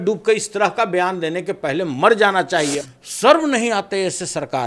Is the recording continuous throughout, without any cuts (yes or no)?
no